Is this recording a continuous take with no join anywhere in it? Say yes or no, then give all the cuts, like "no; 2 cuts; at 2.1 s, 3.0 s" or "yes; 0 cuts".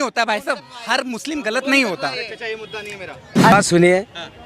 no; 1 cut; at 3.5 s